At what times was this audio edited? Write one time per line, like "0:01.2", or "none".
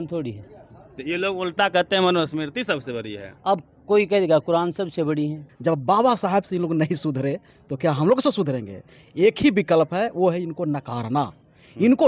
0:05.4